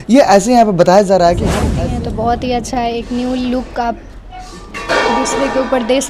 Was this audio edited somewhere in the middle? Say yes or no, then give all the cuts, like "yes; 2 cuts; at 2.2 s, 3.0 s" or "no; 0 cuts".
yes; 1 cut; at 1.6 s